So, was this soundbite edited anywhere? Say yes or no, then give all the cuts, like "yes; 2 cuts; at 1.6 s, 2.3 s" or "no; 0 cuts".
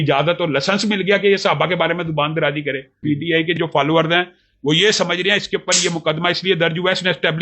yes; 1 cut; at 3.0 s